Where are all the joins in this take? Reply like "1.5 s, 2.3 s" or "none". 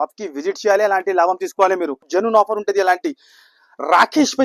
2.1 s